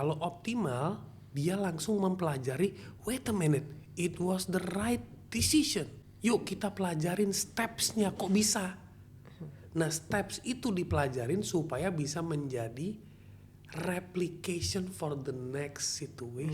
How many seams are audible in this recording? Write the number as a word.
one